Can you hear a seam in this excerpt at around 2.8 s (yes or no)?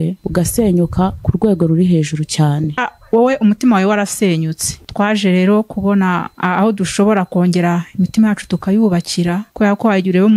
yes